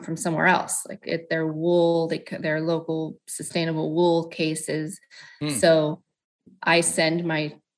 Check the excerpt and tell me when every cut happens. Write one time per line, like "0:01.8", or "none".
none